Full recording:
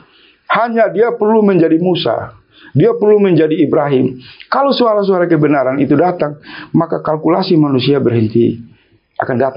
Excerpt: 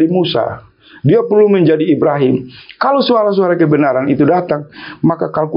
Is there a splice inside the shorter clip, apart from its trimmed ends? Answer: no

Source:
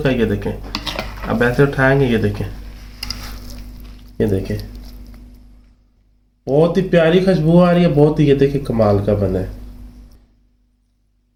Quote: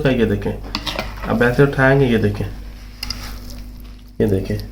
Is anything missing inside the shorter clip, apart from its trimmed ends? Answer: no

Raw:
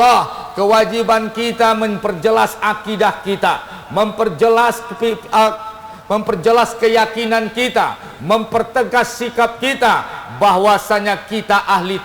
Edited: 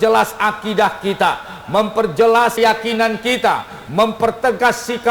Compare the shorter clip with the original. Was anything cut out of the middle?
yes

